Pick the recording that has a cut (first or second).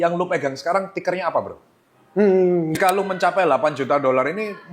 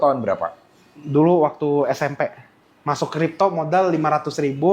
first